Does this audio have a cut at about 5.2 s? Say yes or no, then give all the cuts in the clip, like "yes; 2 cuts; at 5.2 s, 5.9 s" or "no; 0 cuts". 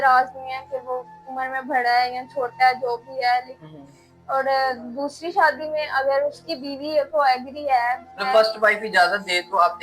no; 1 cut; at 8.1 s